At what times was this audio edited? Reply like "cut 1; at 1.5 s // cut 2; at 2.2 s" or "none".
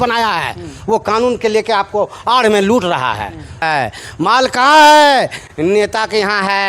cut 1; at 3.6 s